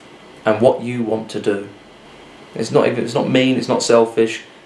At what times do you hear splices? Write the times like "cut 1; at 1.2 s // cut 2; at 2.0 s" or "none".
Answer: none